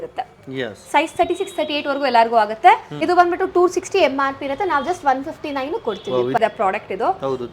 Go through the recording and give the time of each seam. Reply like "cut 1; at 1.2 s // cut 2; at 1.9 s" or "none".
cut 1; at 2.9 s // cut 2; at 6.4 s